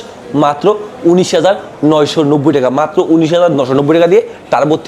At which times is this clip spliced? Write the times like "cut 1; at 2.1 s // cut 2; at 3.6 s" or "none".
none